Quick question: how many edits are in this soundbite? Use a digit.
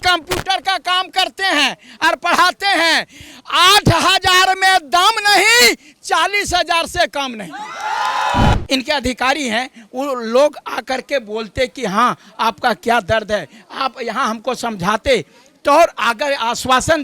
1